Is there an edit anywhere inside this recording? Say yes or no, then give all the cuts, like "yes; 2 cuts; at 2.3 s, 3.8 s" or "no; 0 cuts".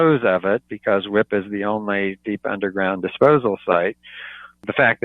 no; 0 cuts